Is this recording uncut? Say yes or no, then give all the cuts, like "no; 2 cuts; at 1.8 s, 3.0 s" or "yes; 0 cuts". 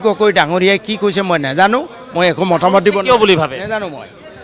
yes; 0 cuts